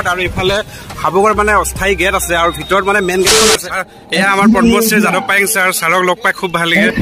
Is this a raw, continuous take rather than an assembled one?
no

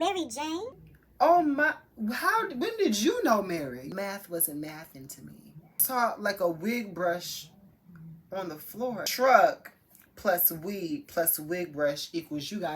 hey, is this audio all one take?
no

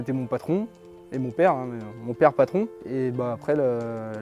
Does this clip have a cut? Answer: yes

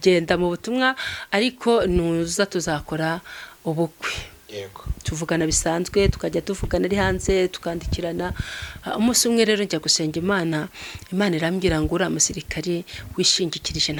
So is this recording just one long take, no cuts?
yes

